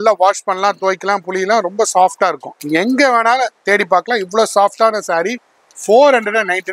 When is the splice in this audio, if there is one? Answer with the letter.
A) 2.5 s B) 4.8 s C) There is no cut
A